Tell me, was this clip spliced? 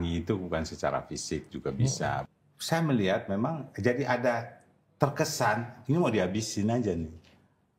yes; 1 cut; at 2.3 s

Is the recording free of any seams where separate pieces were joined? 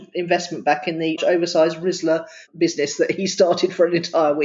no; 2 cuts; at 1.2 s, 2.4 s

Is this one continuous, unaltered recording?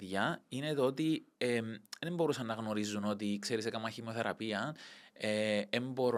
yes; 0 cuts

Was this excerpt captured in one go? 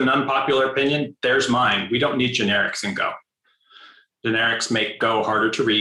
yes; 0 cuts

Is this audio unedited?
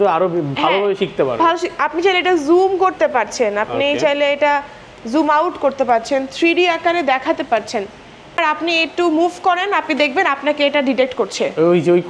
no; 1 cut; at 8.3 s

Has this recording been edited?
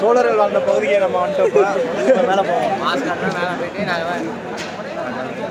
no; 0 cuts

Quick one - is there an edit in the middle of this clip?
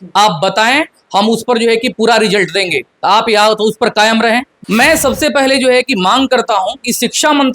yes; 1 cut; at 4.5 s

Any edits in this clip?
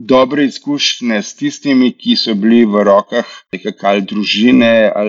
yes; 1 cut; at 3.5 s

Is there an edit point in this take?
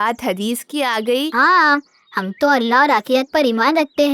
yes; 1 cut; at 1.3 s

